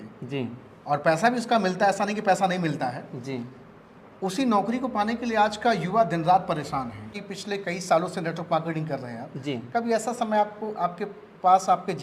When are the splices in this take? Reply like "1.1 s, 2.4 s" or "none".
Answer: 7.2 s

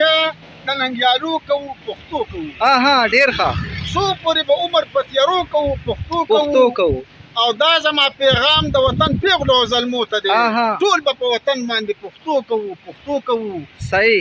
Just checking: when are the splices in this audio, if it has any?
none

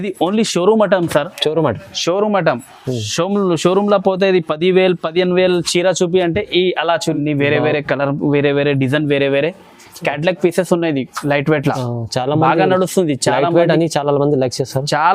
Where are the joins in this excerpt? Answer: 7.2 s

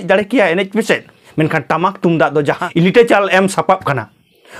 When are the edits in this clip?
1.2 s, 2.7 s

